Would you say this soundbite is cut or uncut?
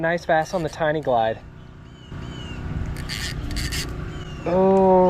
uncut